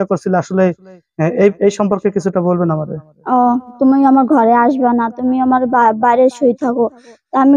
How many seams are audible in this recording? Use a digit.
1